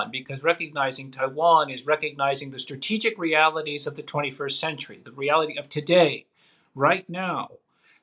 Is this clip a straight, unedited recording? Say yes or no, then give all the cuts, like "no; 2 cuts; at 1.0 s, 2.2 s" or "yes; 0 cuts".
yes; 0 cuts